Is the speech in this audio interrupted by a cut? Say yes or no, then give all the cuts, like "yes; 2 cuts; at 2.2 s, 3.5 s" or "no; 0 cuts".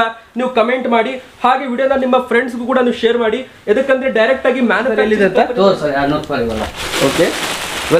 yes; 1 cut; at 5.0 s